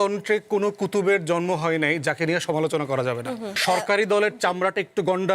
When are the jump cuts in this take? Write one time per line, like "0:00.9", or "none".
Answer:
0:03.5